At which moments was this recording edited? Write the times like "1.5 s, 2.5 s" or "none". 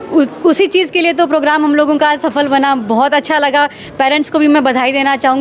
none